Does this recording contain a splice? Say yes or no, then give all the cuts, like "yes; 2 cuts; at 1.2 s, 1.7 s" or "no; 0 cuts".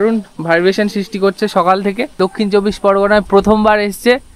yes; 1 cut; at 2.2 s